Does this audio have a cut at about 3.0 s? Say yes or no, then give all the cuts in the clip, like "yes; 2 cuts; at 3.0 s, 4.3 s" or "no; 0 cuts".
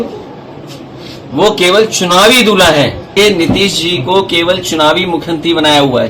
yes; 1 cut; at 3.0 s